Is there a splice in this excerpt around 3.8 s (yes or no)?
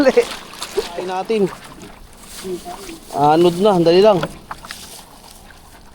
no